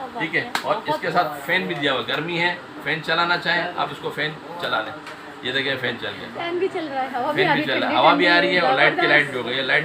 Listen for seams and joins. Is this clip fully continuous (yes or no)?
yes